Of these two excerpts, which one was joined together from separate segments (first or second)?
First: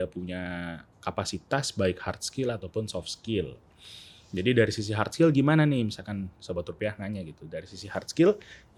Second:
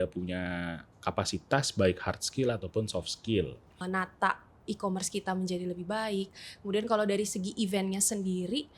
second